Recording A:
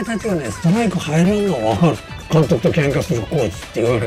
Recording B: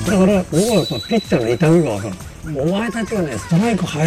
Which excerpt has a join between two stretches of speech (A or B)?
A